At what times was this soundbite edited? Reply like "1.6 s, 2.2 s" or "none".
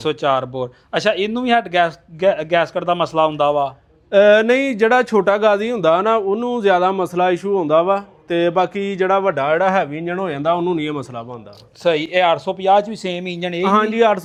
none